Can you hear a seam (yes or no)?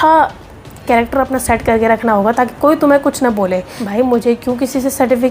yes